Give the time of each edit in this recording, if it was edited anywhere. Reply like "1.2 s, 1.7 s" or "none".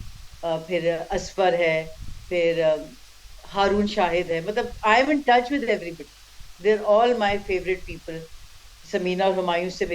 none